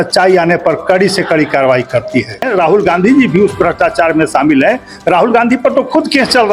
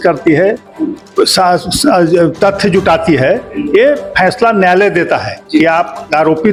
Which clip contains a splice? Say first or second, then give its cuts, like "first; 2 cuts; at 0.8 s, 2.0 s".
first; 1 cut; at 2.4 s